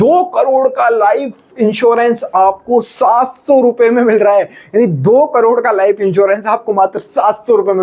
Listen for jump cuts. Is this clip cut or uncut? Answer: uncut